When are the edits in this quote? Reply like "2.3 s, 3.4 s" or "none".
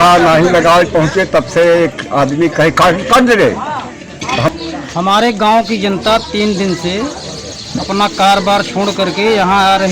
4.5 s